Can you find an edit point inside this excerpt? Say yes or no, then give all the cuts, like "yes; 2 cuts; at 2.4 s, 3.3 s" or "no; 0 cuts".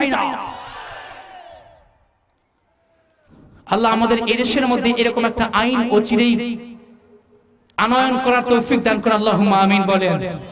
no; 0 cuts